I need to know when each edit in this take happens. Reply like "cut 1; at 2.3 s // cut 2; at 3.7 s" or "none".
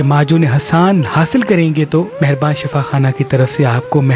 none